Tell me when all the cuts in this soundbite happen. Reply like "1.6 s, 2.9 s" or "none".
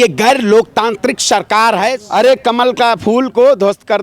2.0 s